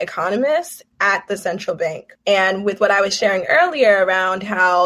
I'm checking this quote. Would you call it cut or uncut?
cut